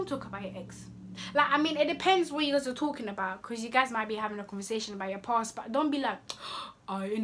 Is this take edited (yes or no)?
no